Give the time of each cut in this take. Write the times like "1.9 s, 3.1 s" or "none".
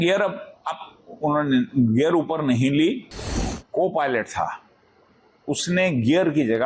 3.6 s